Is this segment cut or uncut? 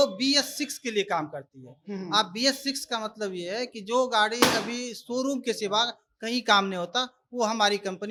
uncut